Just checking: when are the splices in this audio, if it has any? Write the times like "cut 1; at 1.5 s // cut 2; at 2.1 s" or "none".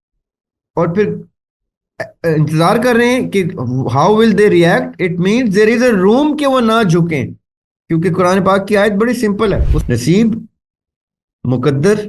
cut 1; at 9.7 s